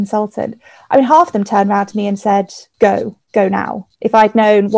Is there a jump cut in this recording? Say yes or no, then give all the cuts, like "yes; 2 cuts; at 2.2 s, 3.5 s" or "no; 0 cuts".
yes; 2 cuts; at 2.6 s, 3.8 s